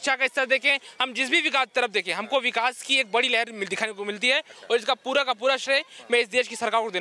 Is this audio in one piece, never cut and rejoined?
yes; 0 cuts

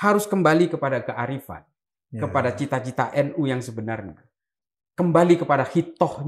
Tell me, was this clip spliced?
no; 0 cuts

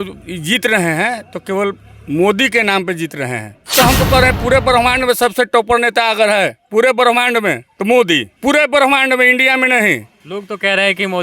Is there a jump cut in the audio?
yes; 4 cuts; at 3.7 s, 7.7 s, 8.3 s, 10.2 s

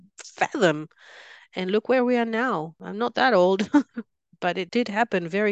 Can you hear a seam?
yes; 2 cuts; at 2.8 s, 4.6 s

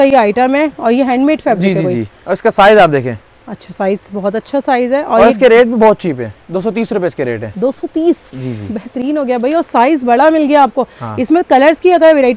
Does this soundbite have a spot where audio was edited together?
no; 0 cuts

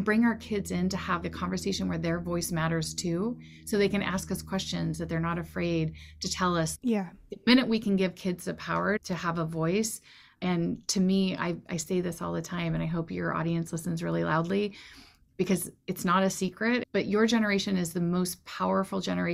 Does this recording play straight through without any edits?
no; 3 cuts; at 6.7 s, 9.0 s, 16.9 s

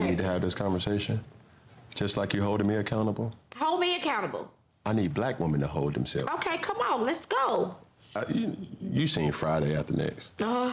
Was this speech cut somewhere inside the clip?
yes; 1 cut; at 8.2 s

